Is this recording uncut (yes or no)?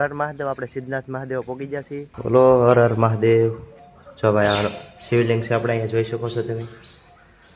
no